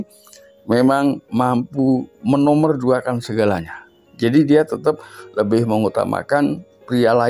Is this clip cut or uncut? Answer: uncut